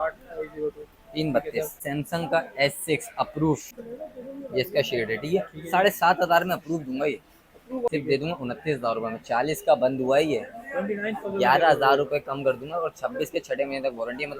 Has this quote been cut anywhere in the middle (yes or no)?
yes